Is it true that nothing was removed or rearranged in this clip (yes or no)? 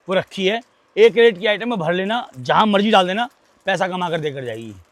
yes